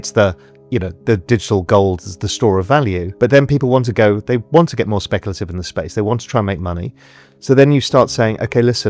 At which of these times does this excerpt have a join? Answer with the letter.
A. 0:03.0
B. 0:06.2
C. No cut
A